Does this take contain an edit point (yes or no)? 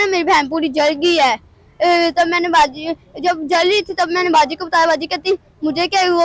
no